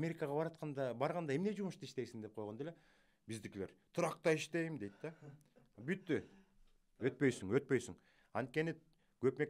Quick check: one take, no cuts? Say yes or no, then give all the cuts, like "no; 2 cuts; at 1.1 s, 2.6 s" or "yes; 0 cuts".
yes; 0 cuts